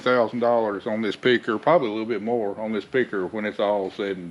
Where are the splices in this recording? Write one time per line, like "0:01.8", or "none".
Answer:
none

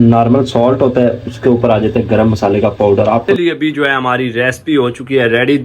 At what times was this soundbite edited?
0:03.3

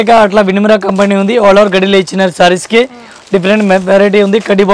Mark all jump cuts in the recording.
none

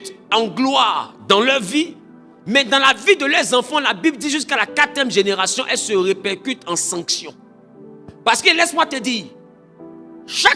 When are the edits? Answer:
none

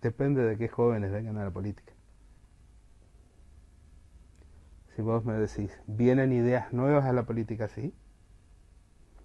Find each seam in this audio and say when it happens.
none

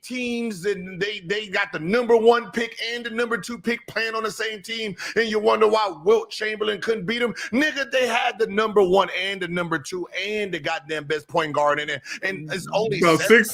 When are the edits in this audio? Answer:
none

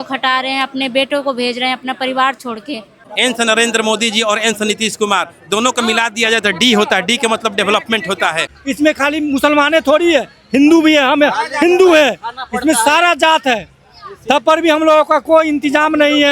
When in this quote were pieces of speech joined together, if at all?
0:03.0
0:08.5

